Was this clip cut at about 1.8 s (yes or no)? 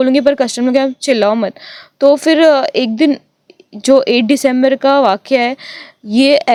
no